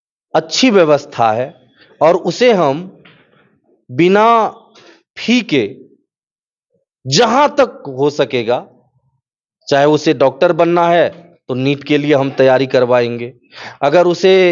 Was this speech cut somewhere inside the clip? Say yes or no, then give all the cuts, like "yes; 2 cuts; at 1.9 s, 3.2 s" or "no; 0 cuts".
no; 0 cuts